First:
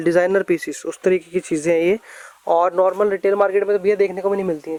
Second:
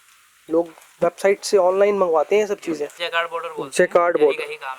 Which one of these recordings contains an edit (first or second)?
second